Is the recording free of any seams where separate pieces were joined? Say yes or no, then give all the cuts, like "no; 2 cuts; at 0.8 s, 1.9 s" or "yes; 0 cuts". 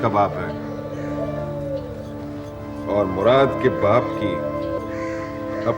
yes; 0 cuts